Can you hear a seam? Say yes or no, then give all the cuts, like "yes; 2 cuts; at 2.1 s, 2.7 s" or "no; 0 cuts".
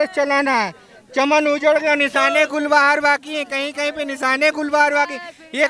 no; 0 cuts